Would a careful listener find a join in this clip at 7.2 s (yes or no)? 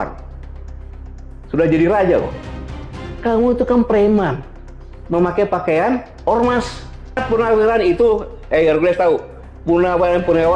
yes